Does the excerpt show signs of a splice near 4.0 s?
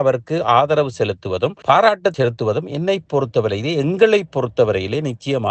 no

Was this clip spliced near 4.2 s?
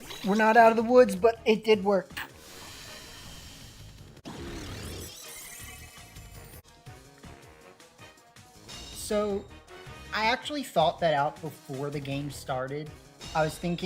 yes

